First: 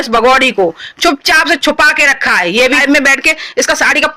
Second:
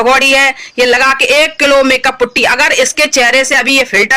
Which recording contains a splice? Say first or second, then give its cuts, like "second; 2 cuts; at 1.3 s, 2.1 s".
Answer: first; 1 cut; at 2.8 s